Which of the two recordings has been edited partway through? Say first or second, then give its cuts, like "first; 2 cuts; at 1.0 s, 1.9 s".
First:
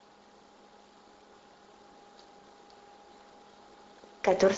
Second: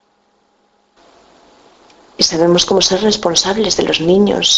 first; 1 cut; at 0.9 s